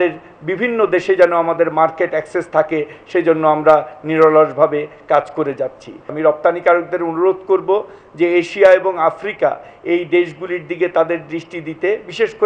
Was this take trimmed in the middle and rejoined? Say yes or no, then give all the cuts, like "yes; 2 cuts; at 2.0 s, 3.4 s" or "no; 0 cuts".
yes; 1 cut; at 6.1 s